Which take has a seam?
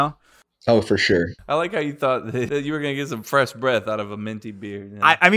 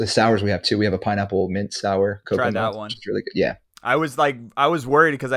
first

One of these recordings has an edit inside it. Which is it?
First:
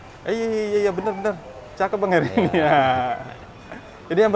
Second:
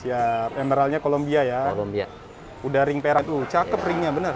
second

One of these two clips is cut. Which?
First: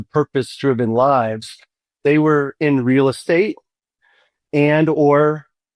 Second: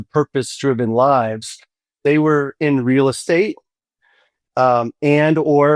first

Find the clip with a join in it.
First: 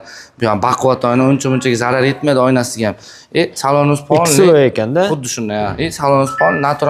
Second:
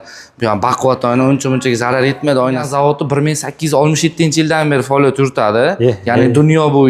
second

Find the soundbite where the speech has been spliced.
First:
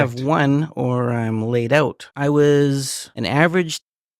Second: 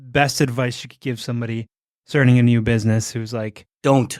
first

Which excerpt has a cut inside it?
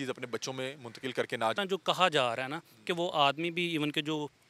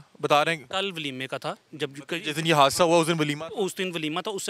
first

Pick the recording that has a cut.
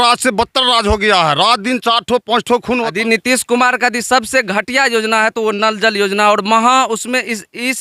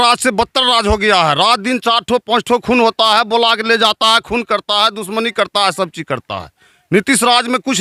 first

